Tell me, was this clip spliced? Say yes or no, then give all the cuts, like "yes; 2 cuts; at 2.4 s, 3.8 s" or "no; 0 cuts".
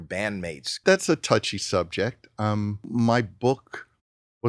yes; 2 cuts; at 0.8 s, 2.8 s